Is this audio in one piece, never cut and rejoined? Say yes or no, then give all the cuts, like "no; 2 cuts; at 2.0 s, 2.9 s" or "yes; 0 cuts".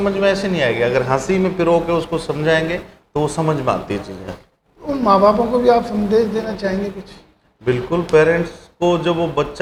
yes; 0 cuts